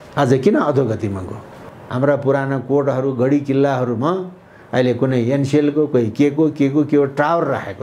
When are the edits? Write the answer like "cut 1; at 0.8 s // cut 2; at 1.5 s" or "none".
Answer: cut 1; at 1.8 s